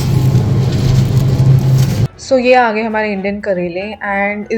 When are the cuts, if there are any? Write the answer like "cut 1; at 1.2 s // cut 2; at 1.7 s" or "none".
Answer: cut 1; at 2.0 s